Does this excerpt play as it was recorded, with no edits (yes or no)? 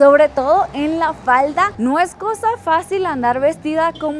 yes